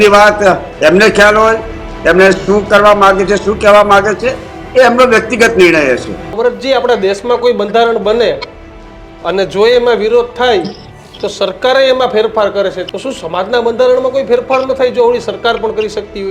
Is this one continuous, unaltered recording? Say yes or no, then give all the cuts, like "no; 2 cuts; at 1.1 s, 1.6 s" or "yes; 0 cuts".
no; 2 cuts; at 6.3 s, 12.8 s